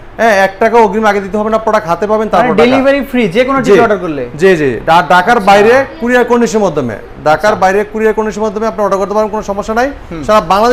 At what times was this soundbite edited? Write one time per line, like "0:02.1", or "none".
none